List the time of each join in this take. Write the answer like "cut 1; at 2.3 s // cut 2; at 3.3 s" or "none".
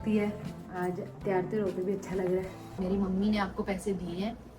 cut 1; at 2.6 s

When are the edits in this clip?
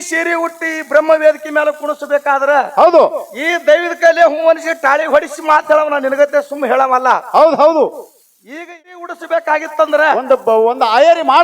cut 1; at 8.5 s

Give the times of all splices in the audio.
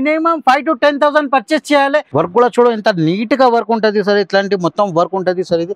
cut 1; at 2.1 s

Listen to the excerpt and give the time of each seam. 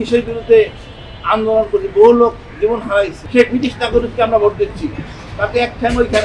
cut 1; at 3.2 s

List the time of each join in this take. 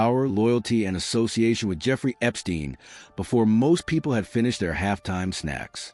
cut 1; at 2.9 s

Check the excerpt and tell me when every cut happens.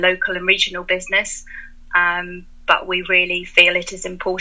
none

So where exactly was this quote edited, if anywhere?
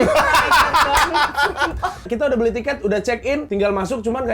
cut 1; at 2.1 s // cut 2; at 3.5 s

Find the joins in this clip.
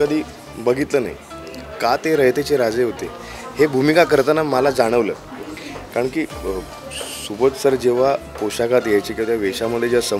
none

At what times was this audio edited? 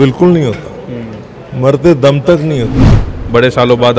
cut 1; at 3.1 s

